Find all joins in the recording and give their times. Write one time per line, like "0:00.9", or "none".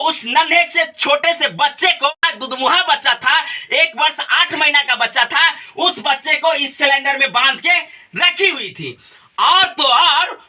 0:02.1